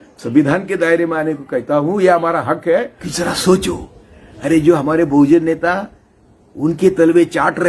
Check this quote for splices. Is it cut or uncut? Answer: cut